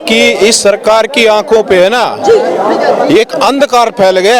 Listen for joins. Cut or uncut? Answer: uncut